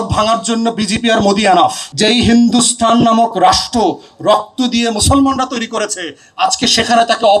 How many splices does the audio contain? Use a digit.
1